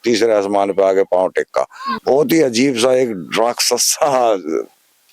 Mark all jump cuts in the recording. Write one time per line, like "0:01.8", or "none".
0:01.9